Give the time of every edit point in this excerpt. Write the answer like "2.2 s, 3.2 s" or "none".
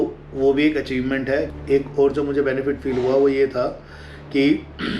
1.5 s